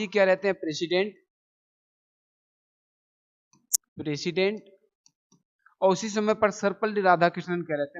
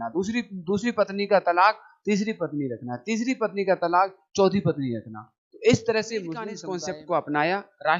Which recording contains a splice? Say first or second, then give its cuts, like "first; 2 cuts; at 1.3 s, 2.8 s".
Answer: second; 1 cut; at 6.6 s